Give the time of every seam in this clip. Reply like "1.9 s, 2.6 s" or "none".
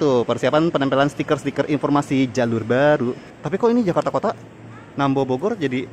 3.3 s